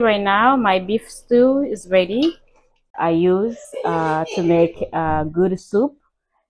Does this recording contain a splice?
yes; 1 cut; at 2.9 s

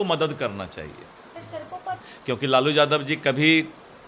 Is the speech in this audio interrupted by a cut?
yes; 1 cut; at 2.0 s

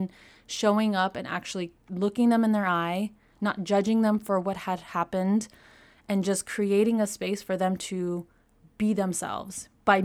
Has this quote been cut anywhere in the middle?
no; 0 cuts

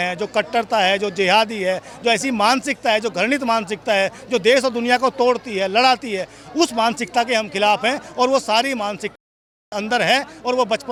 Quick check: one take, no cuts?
yes; 0 cuts

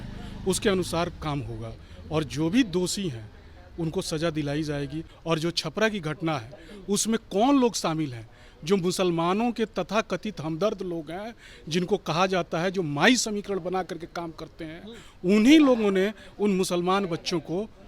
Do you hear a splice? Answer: yes; 1 cut; at 5.1 s

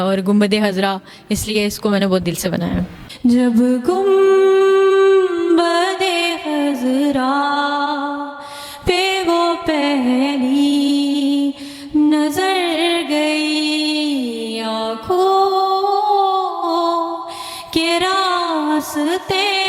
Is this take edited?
yes; 1 cut; at 2.9 s

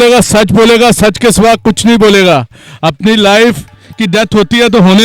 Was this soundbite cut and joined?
no; 0 cuts

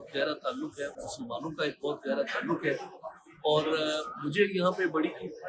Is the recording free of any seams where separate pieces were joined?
yes; 0 cuts

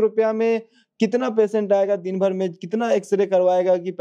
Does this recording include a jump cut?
no; 0 cuts

